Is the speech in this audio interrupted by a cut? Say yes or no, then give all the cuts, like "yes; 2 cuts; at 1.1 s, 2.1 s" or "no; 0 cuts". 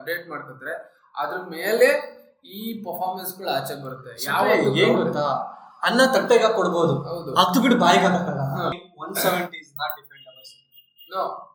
yes; 1 cut; at 8.9 s